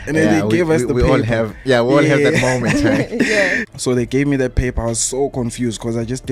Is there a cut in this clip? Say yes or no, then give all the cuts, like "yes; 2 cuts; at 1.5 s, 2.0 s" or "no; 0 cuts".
yes; 1 cut; at 3.6 s